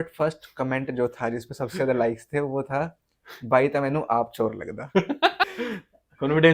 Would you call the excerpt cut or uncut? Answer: cut